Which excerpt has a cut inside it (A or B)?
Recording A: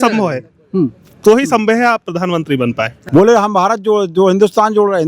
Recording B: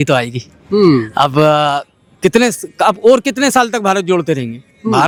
A